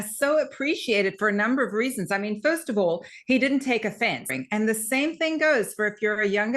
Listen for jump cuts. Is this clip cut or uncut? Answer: cut